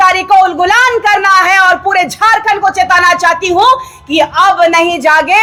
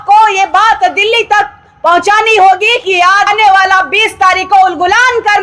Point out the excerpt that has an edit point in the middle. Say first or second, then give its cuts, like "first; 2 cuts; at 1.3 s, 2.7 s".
second; 1 cut; at 3.3 s